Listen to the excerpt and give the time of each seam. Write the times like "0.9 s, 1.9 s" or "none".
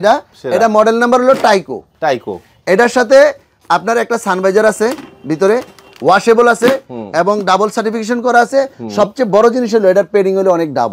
none